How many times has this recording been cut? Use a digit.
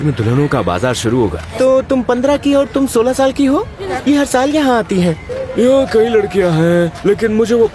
3